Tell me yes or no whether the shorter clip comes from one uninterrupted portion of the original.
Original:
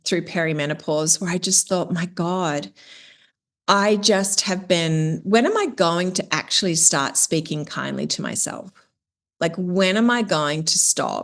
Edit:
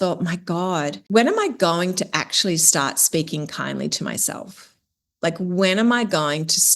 no